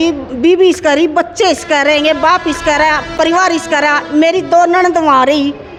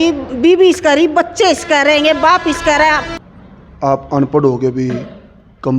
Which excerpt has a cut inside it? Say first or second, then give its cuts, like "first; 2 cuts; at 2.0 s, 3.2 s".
second; 1 cut; at 3.1 s